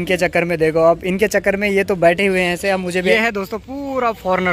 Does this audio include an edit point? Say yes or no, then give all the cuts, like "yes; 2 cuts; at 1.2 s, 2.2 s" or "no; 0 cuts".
yes; 1 cut; at 3.1 s